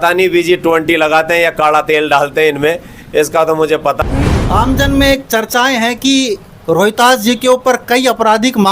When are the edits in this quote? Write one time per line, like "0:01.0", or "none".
0:04.0

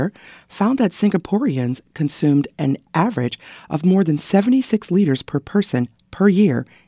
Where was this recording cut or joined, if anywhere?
none

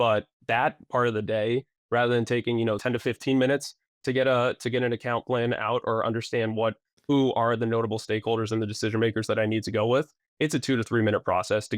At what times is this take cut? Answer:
0:02.8

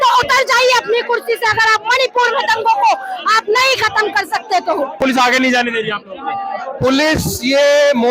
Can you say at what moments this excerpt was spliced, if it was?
0:05.0

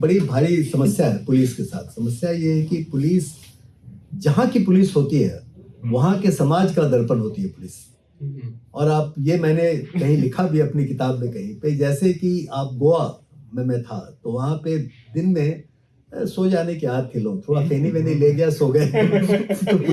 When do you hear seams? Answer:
none

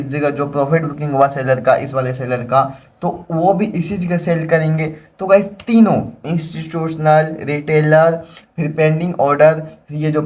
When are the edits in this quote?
none

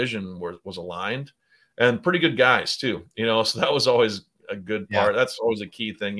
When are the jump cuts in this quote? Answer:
none

